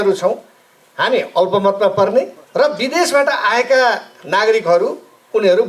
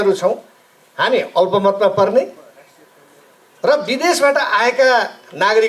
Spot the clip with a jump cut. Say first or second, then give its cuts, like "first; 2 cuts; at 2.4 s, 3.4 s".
first; 1 cut; at 2.4 s